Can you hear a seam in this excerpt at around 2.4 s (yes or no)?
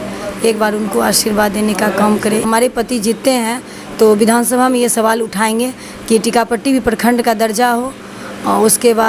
yes